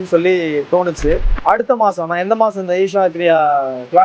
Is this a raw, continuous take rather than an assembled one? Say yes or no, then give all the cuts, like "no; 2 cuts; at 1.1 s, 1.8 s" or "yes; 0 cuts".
no; 1 cut; at 1.3 s